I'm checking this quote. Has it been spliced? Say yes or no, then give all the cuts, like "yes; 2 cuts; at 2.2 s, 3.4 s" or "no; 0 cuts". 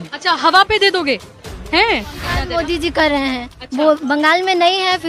yes; 1 cut; at 2.3 s